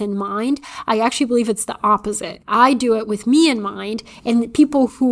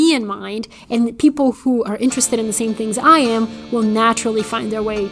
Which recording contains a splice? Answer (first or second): first